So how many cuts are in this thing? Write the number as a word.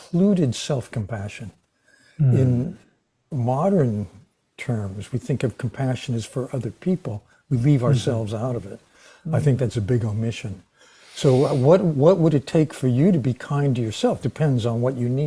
one